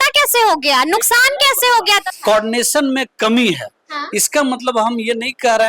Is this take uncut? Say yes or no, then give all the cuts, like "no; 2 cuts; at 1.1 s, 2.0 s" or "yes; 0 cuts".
no; 1 cut; at 2.1 s